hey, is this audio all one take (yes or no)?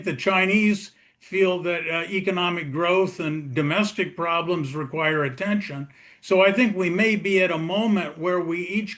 yes